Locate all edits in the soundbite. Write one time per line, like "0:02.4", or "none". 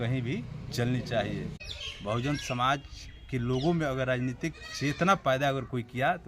0:01.6